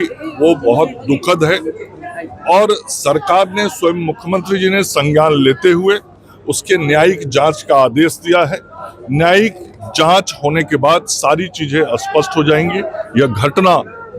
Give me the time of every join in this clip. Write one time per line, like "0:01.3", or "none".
none